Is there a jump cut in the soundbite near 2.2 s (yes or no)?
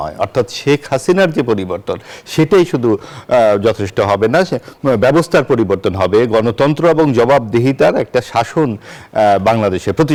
no